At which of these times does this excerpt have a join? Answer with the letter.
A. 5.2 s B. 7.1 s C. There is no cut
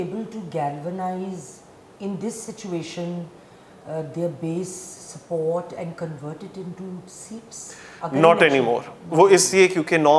C